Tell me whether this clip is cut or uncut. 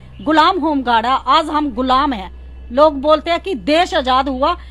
uncut